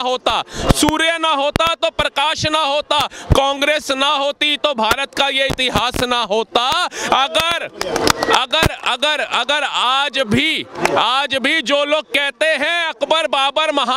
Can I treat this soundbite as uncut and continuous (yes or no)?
yes